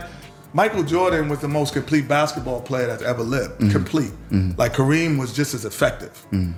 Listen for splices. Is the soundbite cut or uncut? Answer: uncut